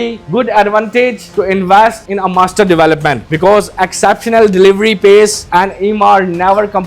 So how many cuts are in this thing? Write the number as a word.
one